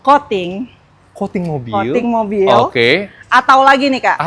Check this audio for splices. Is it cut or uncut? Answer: uncut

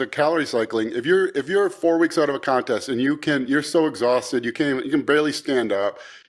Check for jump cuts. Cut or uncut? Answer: uncut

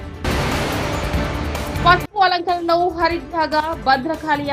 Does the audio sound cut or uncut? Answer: uncut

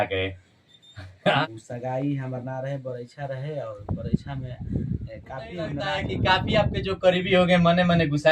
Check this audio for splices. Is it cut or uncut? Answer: cut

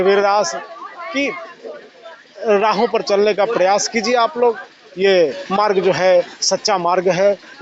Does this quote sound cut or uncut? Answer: uncut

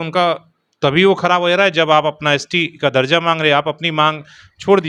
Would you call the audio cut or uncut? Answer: uncut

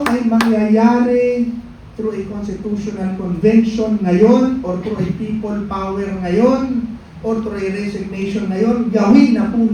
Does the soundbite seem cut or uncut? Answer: uncut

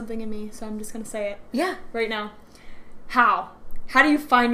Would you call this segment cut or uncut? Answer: uncut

